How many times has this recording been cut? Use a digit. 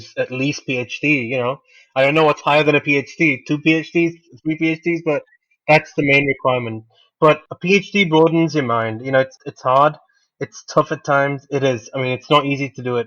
1